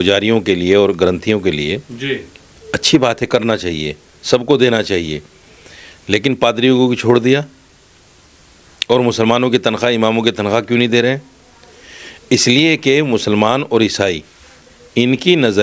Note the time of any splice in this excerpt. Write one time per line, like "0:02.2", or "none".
none